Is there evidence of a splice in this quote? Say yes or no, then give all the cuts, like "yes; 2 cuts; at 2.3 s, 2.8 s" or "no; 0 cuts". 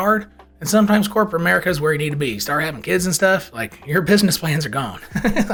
no; 0 cuts